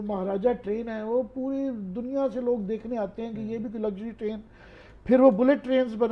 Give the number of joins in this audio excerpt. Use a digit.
0